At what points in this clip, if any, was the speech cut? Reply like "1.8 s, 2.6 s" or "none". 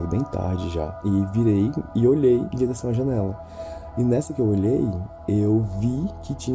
1.0 s, 1.9 s